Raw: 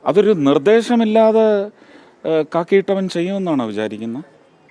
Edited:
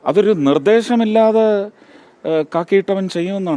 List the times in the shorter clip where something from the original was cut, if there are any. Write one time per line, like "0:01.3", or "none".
none